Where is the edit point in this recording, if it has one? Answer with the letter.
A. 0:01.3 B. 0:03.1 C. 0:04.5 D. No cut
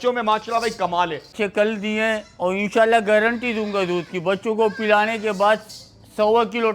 A